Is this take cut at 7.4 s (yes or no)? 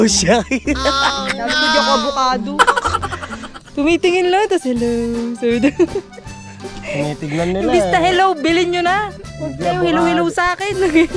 no